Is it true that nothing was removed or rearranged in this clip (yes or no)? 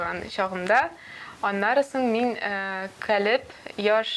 yes